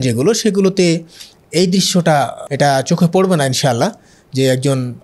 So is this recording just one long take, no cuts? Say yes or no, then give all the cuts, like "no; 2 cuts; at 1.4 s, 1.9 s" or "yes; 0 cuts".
no; 1 cut; at 2.4 s